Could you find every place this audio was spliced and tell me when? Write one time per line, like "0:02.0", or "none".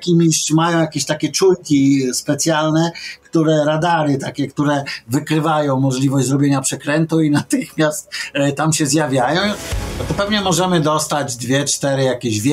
0:09.7